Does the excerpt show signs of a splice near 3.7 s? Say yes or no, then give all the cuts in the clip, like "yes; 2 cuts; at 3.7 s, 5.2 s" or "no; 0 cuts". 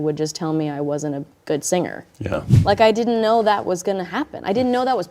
no; 2 cuts; at 1.3 s, 2.5 s